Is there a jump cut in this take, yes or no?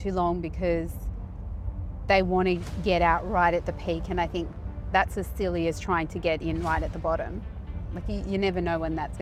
no